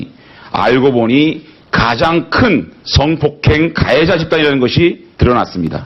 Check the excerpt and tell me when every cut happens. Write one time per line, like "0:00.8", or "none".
0:04.2